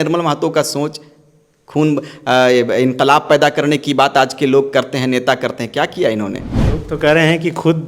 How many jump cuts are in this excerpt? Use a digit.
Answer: 1